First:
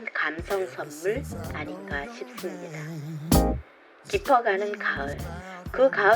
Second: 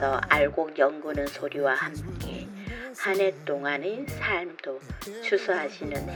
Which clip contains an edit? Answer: first; 2 cuts; at 2.8 s, 3.9 s

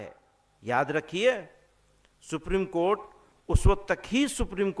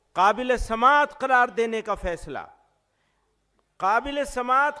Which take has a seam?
second; 1 cut; at 1.2 s

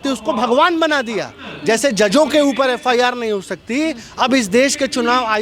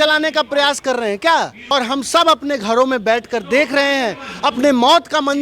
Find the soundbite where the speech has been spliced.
second; 1 cut; at 1.6 s

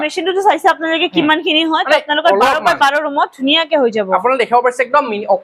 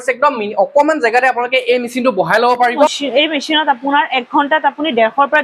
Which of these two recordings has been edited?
second; 1 cut; at 3.0 s

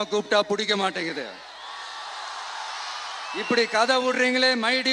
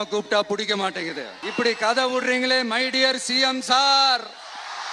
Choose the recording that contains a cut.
second; 1 cut; at 1.3 s

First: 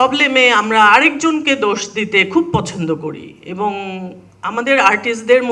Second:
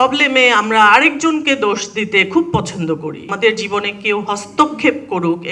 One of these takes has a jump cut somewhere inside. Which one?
second; 1 cut; at 3.3 s

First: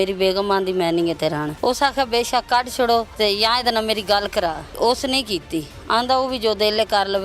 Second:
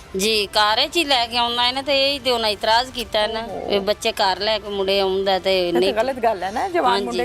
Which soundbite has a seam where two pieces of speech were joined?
first; 3 cuts; at 1.5 s, 3.1 s, 4.7 s

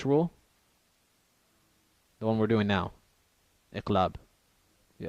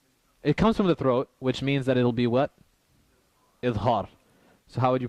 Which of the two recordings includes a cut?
first; 1 cut; at 2.2 s

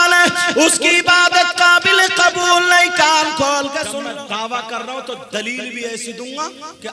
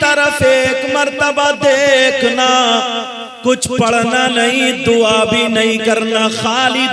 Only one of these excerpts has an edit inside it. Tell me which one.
first; 1 cut; at 3.9 s

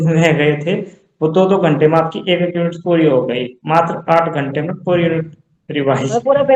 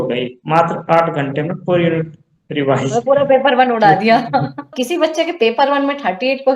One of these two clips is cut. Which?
second; 1 cut; at 4.8 s

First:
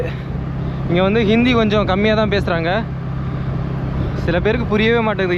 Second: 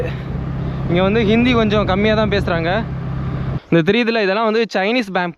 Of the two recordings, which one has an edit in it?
second; 1 cut; at 3.5 s

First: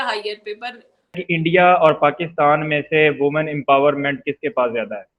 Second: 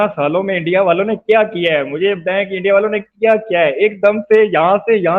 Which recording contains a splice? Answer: first; 1 cut; at 1.2 s

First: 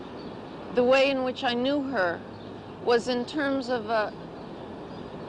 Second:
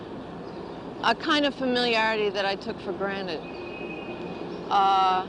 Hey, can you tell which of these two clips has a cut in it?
second; 1 cut; at 3.7 s

